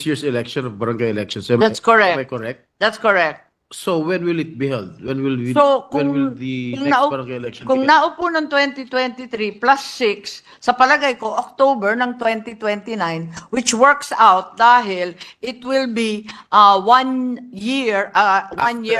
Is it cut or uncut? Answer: uncut